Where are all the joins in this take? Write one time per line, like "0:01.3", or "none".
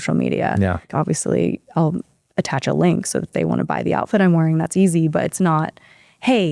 0:00.9